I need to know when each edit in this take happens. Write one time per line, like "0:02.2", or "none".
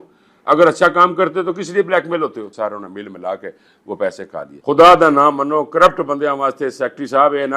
0:02.5
0:04.5